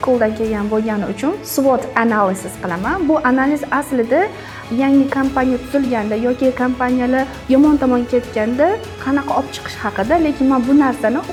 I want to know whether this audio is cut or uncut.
uncut